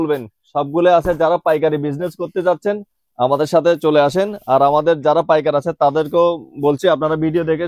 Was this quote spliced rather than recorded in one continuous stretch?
no; 0 cuts

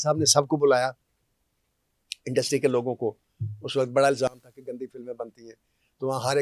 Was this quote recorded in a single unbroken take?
yes; 0 cuts

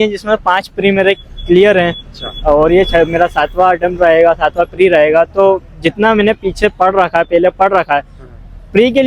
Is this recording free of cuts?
yes; 0 cuts

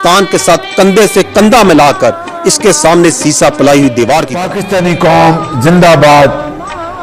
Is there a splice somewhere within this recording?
yes; 1 cut; at 4.6 s

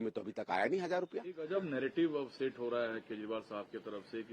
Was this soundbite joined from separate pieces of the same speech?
no; 0 cuts

